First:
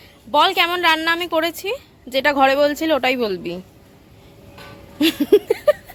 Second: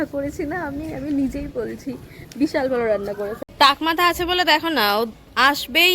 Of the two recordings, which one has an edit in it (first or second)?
second